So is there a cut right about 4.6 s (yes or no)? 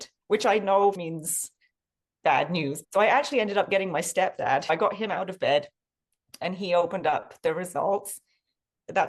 yes